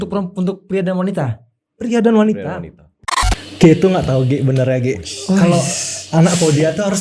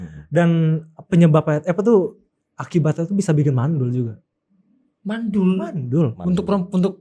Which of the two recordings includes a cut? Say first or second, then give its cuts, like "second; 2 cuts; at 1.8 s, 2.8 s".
first; 1 cut; at 3.2 s